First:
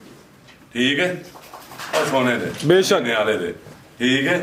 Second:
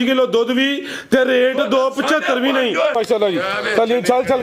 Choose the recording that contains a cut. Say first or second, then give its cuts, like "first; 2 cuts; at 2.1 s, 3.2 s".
second; 1 cut; at 2.9 s